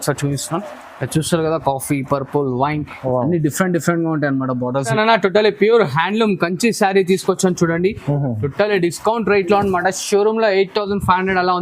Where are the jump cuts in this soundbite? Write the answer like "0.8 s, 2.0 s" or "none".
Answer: 4.9 s